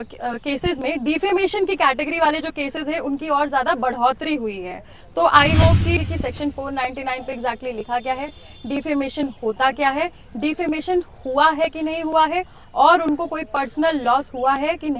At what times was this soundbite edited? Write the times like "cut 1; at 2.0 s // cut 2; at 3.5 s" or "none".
cut 1; at 6.0 s